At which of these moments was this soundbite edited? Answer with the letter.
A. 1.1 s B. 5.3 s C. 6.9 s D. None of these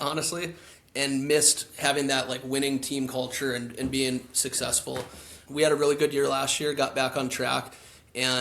B